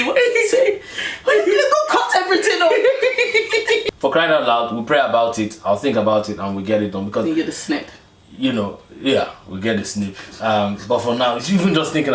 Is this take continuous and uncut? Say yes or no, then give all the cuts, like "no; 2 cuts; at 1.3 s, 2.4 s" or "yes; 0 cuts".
no; 1 cut; at 3.8 s